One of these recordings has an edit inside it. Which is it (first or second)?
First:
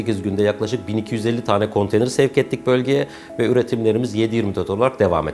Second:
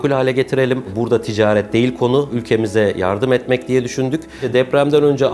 second